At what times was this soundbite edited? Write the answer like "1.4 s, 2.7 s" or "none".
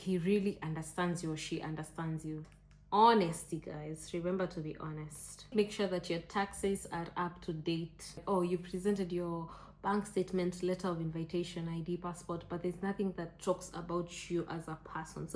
2.5 s, 5.5 s, 8.2 s